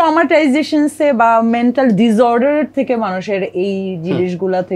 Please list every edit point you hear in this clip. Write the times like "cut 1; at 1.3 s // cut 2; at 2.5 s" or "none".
none